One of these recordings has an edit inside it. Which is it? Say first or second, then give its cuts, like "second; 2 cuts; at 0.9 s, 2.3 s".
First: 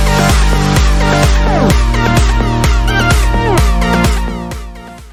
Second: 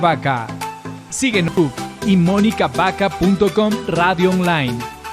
second; 1 cut; at 1.6 s